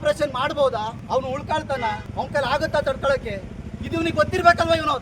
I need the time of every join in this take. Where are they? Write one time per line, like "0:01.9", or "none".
0:01.0
0:02.1